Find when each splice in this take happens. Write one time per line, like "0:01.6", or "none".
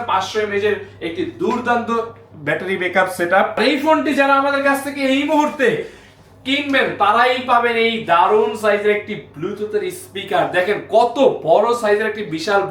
0:03.6